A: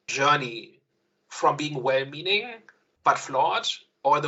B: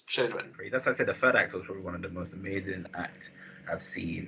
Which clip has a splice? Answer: B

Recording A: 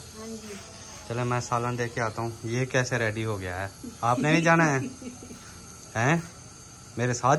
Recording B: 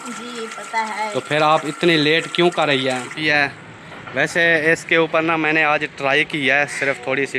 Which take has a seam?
B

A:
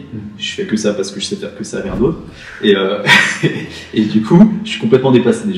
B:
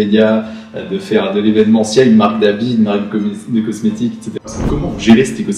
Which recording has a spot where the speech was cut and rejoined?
B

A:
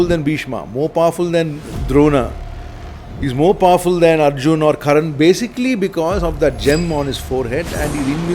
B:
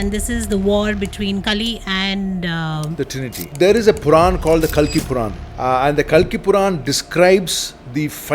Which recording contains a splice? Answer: B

